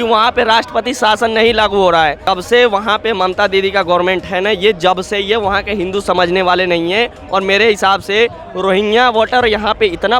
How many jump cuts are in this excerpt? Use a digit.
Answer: 1